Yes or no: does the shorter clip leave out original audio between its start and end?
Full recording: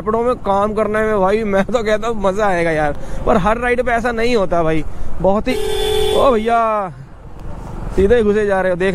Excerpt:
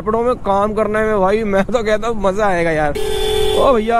yes